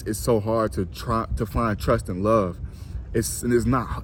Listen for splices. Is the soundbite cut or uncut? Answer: uncut